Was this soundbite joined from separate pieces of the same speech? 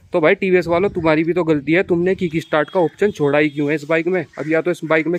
no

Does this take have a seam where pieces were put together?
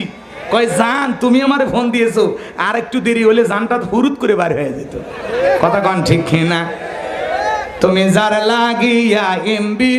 no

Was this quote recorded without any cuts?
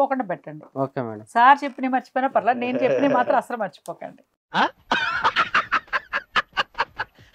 yes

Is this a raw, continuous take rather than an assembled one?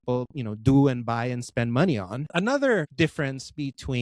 no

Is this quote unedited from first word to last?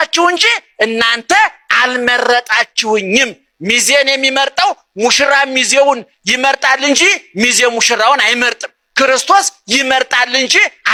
yes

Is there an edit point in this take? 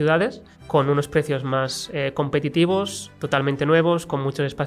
no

